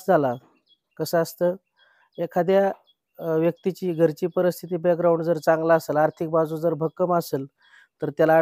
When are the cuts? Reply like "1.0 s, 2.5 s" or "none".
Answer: none